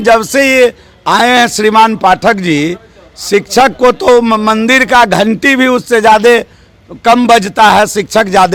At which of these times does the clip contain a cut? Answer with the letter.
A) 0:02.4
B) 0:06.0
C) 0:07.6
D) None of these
D